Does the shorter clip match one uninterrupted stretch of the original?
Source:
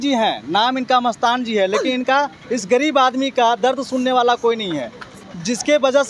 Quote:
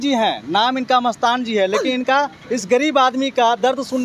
yes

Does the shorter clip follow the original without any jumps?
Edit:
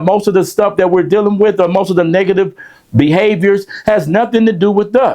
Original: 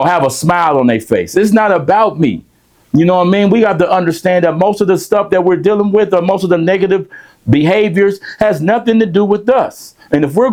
yes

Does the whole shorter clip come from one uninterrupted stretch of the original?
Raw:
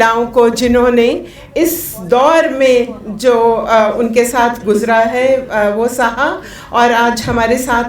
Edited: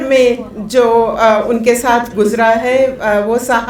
yes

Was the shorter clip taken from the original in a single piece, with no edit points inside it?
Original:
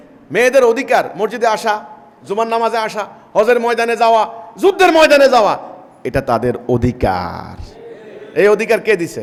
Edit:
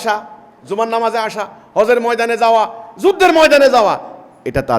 yes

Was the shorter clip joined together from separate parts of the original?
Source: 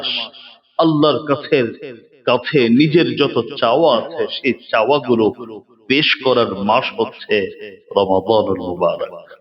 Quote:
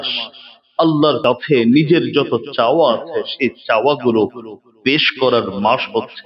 yes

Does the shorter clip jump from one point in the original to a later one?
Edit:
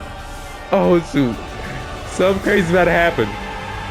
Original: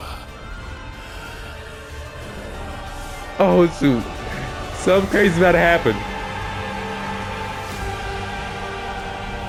no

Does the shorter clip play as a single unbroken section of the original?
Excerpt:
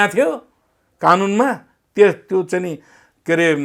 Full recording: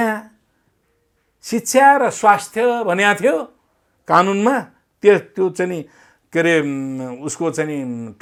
yes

